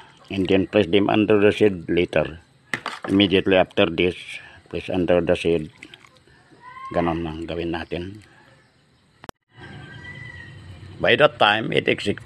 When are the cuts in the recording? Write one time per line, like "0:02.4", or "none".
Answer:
0:09.4

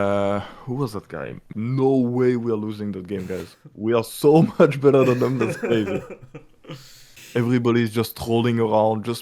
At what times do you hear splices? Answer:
0:01.5
0:07.0

